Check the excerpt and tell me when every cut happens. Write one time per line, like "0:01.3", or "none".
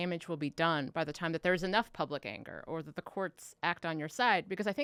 none